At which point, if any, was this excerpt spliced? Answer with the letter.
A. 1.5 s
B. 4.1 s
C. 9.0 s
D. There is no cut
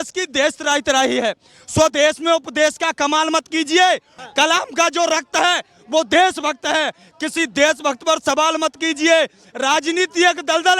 B